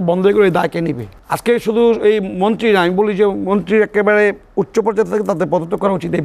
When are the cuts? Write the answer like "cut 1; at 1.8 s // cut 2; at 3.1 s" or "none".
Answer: none